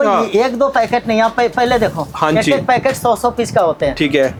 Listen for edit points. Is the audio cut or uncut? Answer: uncut